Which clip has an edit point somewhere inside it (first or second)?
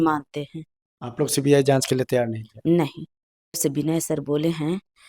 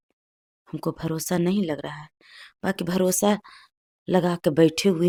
first